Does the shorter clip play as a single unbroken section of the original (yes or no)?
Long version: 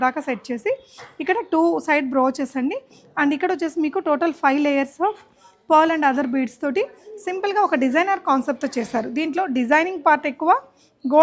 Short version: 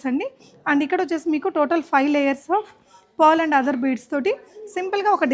yes